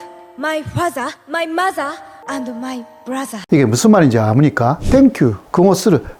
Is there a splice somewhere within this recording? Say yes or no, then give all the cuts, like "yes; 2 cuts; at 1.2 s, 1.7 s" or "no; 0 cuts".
yes; 3 cuts; at 1.2 s, 2.1 s, 4.8 s